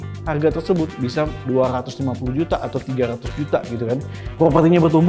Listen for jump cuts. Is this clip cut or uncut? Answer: cut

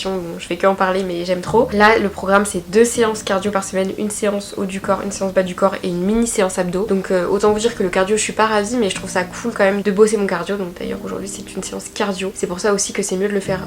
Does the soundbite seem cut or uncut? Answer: uncut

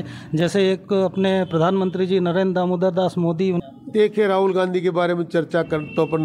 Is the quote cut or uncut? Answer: cut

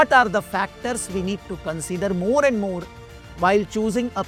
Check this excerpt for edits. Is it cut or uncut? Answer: uncut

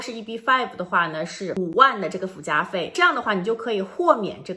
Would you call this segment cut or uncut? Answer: cut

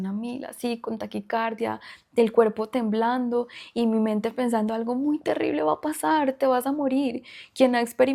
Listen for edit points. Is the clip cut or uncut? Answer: uncut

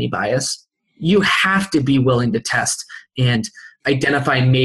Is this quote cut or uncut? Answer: cut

